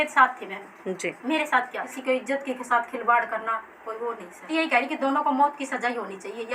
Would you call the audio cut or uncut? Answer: cut